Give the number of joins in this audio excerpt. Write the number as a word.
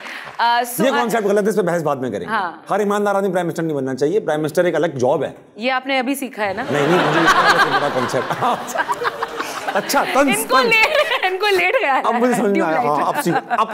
zero